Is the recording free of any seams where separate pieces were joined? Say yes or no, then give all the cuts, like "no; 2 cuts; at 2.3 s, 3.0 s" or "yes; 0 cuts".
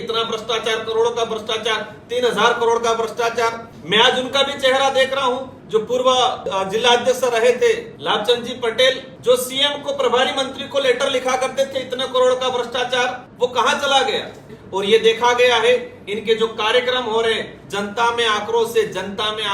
no; 7 cuts; at 3.7 s, 5.5 s, 6.4 s, 7.9 s, 9.1 s, 13.2 s, 14.6 s